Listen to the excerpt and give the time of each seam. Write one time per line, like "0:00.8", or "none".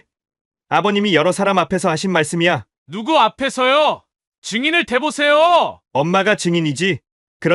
none